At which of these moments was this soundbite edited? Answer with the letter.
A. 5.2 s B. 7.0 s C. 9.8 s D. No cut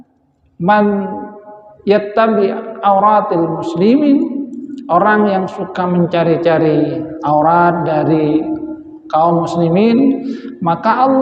D